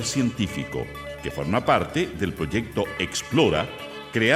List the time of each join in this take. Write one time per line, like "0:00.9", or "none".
none